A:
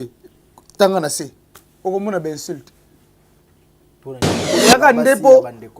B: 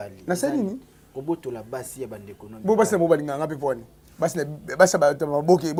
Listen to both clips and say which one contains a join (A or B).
A